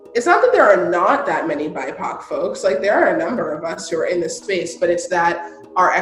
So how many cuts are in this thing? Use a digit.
0